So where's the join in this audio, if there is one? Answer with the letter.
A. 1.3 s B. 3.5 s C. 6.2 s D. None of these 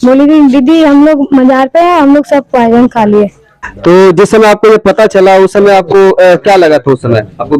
B